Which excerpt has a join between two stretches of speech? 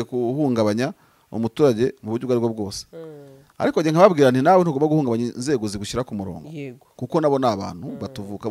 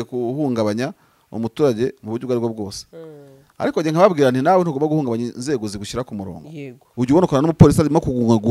second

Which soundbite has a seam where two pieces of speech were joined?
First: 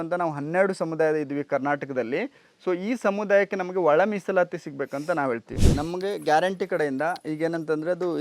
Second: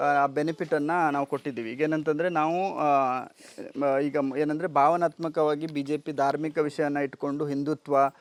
first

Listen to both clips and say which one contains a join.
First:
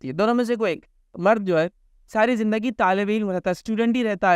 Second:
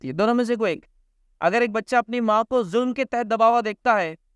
first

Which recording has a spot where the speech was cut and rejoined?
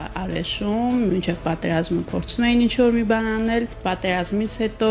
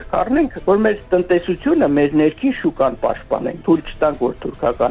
first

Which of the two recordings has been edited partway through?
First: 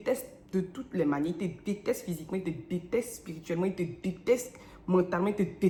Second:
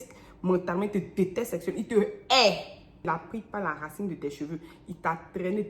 second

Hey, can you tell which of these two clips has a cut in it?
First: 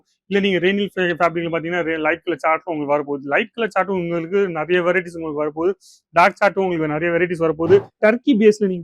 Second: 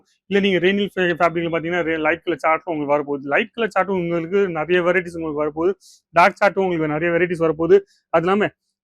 first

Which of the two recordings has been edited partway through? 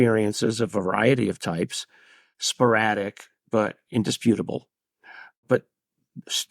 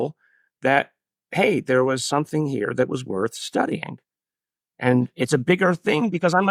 first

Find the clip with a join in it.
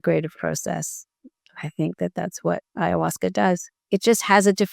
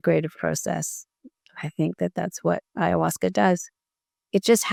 first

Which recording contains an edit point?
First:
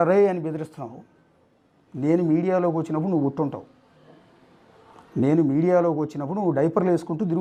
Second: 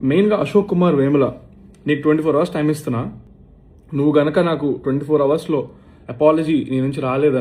second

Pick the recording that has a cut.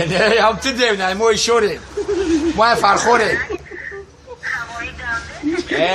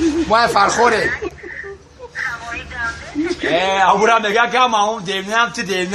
second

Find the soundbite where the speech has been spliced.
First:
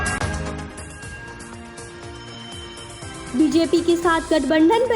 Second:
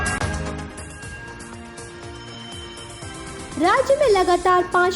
second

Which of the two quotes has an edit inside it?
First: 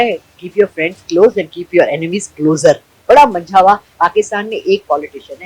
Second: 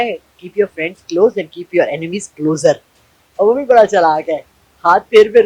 first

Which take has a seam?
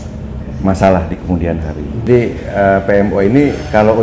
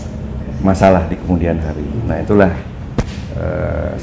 first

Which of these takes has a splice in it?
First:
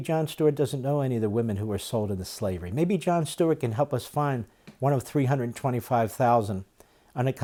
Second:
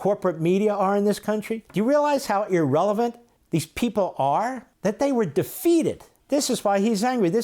second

